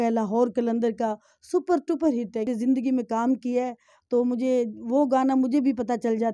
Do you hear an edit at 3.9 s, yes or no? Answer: no